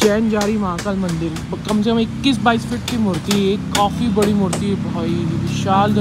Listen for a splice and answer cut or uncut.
uncut